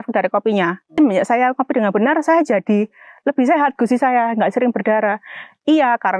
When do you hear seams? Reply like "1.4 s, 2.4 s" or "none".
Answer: 0.9 s